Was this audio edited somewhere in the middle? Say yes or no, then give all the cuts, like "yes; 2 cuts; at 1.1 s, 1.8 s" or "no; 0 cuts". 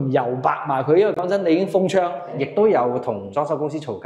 yes; 1 cut; at 2.3 s